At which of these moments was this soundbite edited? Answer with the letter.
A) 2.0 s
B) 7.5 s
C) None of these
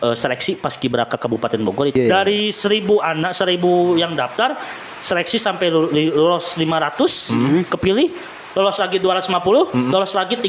A